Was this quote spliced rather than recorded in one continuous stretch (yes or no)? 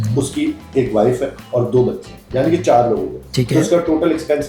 no